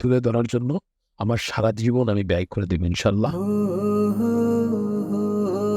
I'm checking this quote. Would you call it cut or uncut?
cut